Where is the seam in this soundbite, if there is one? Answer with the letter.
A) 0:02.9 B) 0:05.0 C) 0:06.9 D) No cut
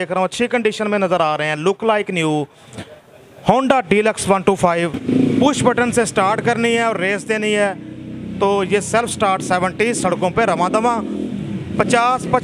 B